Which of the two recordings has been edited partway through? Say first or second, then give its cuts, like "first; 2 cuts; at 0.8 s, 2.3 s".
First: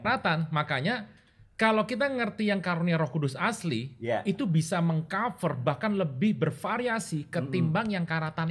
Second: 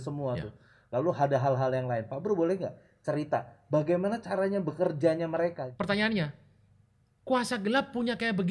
second; 1 cut; at 5.6 s